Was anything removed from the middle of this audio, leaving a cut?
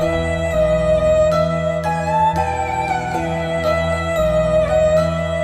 no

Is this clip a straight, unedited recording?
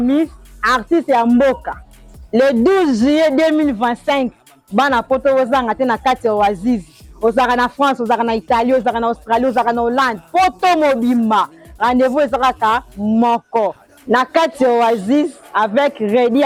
yes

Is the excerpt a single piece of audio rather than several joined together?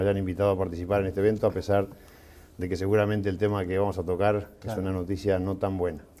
yes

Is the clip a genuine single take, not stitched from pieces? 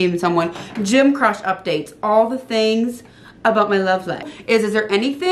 no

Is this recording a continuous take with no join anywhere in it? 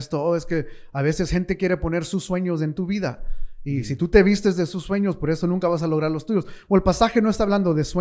yes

